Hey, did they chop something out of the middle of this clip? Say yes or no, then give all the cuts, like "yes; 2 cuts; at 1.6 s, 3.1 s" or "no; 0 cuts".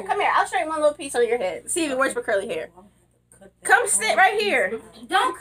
no; 0 cuts